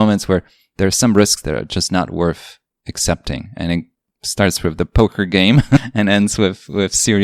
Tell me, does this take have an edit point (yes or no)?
no